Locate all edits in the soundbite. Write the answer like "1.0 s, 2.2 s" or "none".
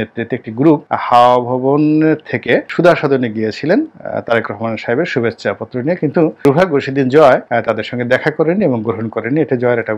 none